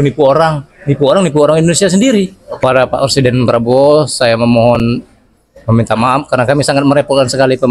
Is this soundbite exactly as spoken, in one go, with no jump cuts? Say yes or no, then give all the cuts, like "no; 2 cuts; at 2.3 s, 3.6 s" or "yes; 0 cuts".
no; 1 cut; at 2.7 s